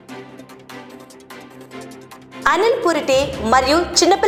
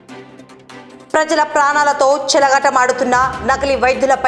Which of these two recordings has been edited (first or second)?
second